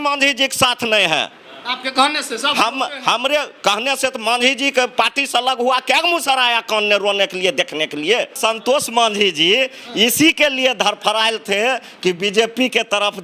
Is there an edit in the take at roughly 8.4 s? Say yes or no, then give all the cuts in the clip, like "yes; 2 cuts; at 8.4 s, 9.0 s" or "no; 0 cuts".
yes; 1 cut; at 8.4 s